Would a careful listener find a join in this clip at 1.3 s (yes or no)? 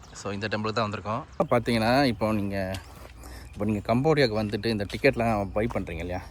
yes